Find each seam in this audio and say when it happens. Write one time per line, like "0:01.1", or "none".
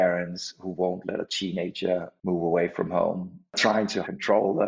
0:02.1
0:03.6